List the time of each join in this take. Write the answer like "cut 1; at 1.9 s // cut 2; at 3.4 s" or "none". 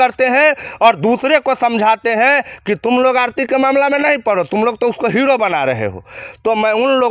none